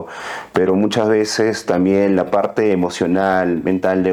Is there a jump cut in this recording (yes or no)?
no